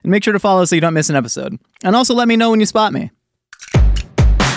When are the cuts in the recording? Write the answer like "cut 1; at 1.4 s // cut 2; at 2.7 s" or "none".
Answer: cut 1; at 3.2 s